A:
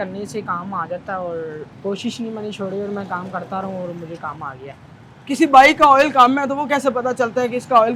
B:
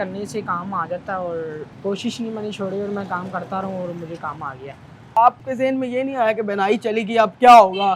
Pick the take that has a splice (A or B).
B